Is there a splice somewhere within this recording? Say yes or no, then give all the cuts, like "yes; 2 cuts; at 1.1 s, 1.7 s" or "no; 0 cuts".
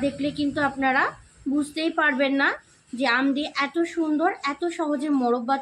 no; 0 cuts